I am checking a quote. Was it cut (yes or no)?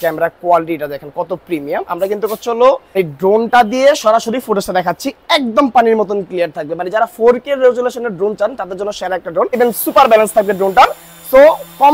yes